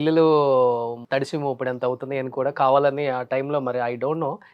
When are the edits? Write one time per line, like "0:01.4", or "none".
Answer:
0:01.0